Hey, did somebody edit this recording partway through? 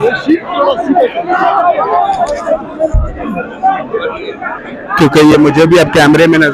no; 0 cuts

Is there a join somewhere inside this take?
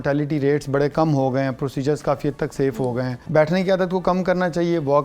yes; 1 cut; at 3.1 s

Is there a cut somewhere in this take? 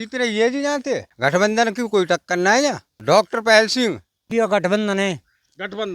yes; 3 cuts; at 1.1 s, 2.5 s, 4.3 s

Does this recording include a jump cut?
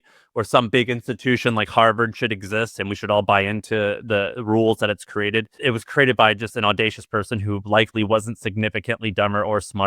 yes; 1 cut; at 5.5 s

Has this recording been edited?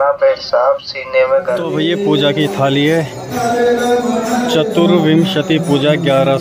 yes; 1 cut; at 1.7 s

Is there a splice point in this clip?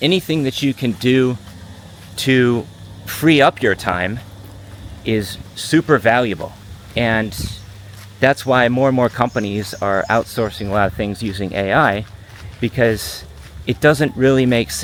no; 0 cuts

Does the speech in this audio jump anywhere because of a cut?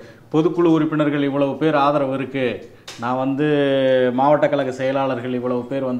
no; 0 cuts

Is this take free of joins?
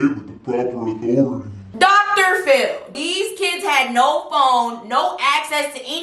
no; 1 cut; at 2.9 s

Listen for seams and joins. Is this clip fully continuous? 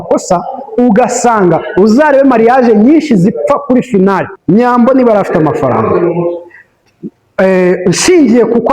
no; 1 cut; at 4.3 s

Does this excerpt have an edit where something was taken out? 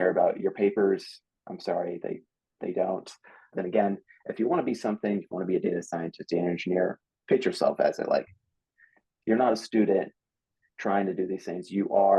yes; 1 cut; at 3.5 s

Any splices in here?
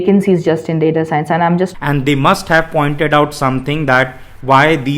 yes; 1 cut; at 1.7 s

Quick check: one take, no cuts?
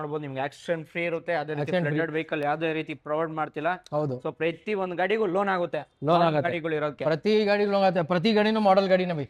yes; 0 cuts

